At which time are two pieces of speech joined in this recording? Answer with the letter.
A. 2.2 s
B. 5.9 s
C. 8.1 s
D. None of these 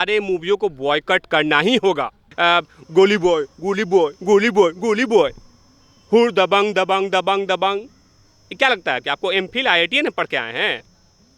A